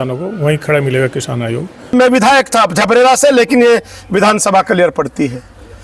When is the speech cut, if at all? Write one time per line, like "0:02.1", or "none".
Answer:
0:01.9